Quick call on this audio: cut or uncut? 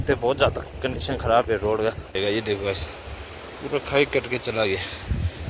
cut